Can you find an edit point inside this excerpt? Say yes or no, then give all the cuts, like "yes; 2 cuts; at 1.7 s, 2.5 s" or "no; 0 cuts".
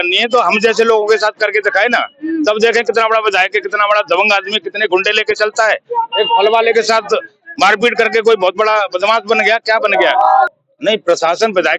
yes; 1 cut; at 10.6 s